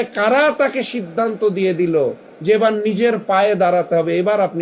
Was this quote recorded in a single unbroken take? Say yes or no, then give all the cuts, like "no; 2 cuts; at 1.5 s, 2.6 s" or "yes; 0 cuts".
yes; 0 cuts